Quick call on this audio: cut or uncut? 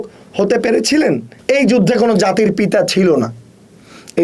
cut